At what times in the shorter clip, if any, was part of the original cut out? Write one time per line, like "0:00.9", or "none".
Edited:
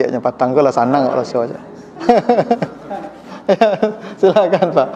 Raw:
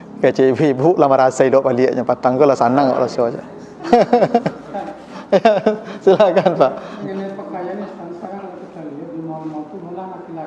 none